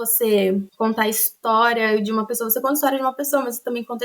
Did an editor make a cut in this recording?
no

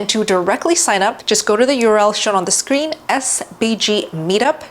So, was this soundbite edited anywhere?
yes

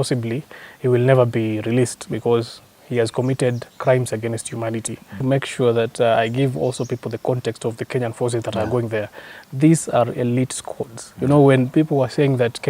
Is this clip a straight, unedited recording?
no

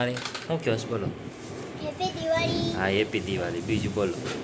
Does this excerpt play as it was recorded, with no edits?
yes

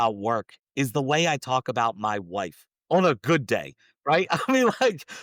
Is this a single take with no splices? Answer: yes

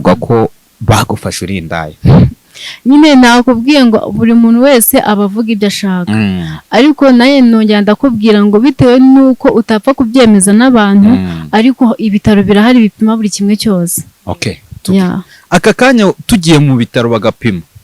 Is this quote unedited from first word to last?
yes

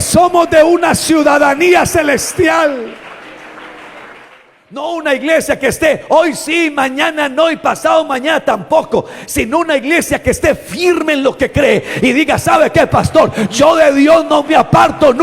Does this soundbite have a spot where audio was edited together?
yes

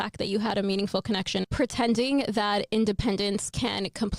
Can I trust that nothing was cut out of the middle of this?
no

